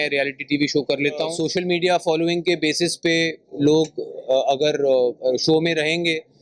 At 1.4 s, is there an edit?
yes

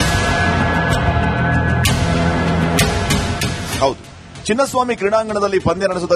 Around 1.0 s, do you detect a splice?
yes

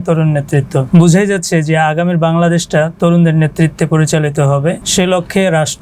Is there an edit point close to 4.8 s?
yes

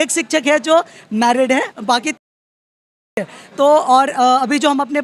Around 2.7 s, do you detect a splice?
no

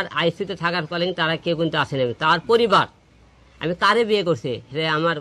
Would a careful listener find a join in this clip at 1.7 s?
no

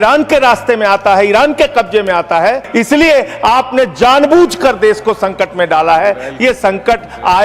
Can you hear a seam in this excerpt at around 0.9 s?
no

